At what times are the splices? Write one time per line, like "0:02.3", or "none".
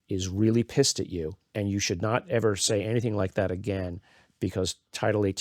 0:01.4

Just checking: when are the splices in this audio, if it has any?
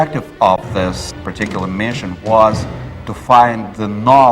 0:01.1

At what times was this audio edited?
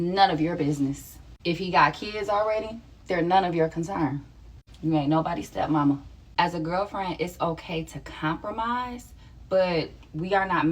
0:05.5
0:06.5

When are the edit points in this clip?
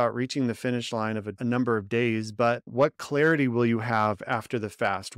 0:01.3
0:02.7

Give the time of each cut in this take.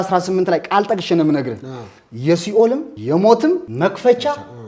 0:02.9
0:03.7

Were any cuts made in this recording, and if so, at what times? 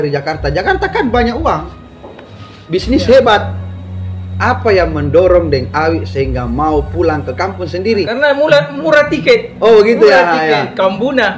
0:08.1

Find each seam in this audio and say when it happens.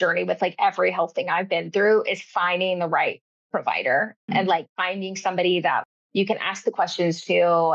0:04.2
0:05.8

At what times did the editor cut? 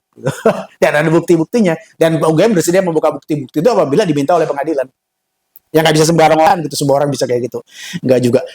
0:06.5

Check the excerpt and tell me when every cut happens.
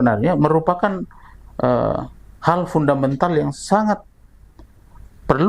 none

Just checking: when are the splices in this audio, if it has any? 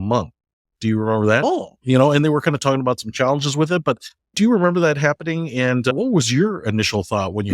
0:01.4

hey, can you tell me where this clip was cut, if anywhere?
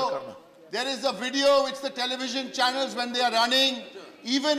none

